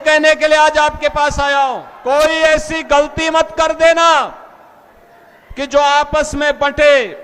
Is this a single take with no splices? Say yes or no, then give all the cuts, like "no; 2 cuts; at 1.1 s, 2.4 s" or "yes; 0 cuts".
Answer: no; 1 cut; at 1.9 s